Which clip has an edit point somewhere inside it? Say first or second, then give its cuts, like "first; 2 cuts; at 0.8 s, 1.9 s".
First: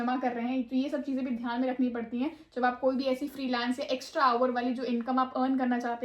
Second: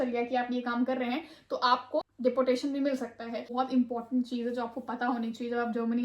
second; 2 cuts; at 2.0 s, 3.5 s